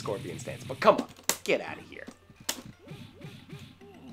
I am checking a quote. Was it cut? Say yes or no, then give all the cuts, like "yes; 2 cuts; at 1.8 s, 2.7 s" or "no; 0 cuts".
yes; 1 cut; at 2.3 s